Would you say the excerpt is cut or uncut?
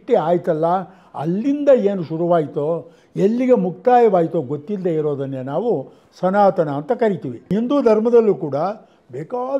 uncut